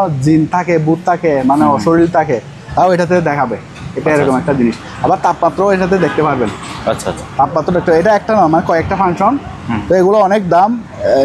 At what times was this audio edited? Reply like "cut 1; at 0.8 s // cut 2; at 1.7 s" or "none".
none